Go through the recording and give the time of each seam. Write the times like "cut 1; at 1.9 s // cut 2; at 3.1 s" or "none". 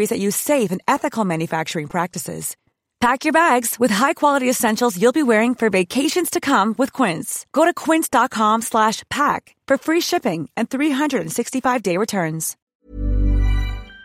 cut 1; at 12.5 s